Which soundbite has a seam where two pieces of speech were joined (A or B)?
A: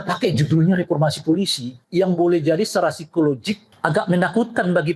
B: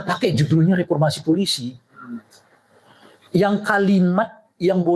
A